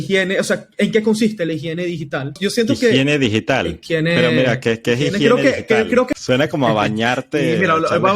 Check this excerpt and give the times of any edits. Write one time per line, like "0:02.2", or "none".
0:02.4
0:03.8
0:06.1